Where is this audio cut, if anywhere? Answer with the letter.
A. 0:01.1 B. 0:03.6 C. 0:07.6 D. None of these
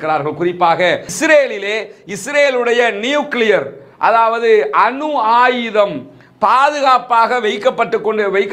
A